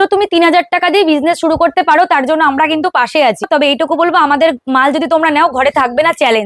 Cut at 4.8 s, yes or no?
no